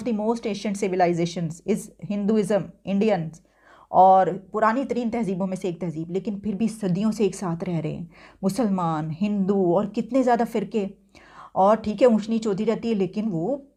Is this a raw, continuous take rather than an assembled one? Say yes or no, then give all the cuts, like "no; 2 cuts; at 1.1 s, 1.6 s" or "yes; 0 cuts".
yes; 0 cuts